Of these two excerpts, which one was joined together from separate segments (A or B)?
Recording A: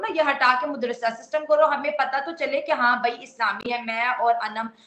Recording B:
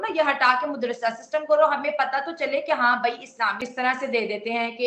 B